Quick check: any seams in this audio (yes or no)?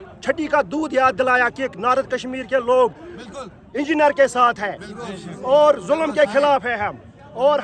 no